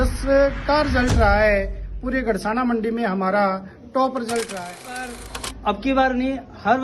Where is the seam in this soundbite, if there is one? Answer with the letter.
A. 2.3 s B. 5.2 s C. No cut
B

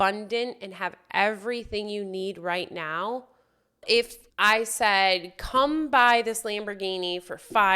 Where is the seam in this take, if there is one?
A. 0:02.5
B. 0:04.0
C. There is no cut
B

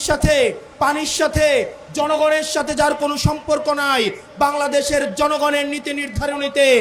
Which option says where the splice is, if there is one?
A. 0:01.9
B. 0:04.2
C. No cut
C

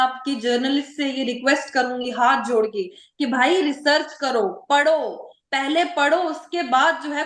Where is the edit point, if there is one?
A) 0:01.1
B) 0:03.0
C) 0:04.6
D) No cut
D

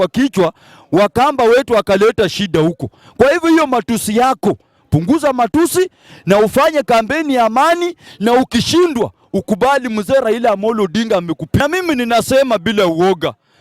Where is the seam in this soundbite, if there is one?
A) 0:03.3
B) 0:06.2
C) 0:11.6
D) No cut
C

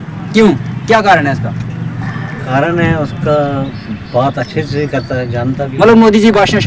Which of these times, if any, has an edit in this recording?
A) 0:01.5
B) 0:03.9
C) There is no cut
C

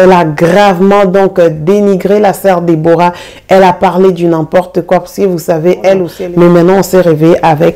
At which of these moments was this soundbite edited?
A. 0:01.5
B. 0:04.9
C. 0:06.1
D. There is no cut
C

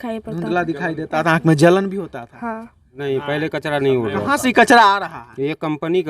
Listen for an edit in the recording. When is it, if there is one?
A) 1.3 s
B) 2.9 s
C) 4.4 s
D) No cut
B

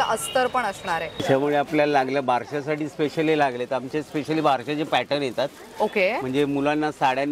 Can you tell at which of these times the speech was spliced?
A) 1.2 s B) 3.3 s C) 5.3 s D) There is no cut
A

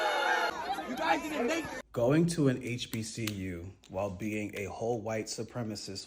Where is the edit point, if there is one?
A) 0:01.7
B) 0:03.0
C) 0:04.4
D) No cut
A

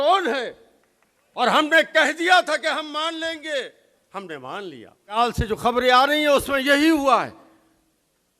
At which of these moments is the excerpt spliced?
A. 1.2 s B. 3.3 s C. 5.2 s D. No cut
C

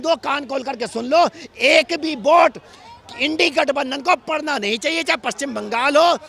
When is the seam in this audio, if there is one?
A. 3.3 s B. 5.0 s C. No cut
C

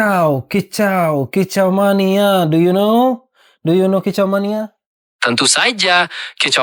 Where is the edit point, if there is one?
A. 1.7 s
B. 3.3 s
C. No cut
C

